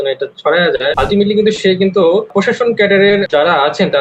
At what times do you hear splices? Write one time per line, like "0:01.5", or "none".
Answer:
0:00.9
0:02.3